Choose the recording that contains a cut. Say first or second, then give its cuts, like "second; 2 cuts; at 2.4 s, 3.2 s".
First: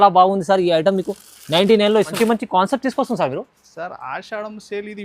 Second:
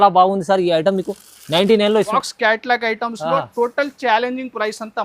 second; 1 cut; at 2.1 s